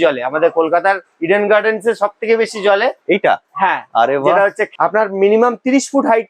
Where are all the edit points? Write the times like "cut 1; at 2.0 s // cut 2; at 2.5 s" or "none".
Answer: cut 1; at 4.6 s